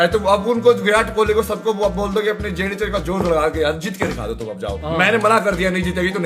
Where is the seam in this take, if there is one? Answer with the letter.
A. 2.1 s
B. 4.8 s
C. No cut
B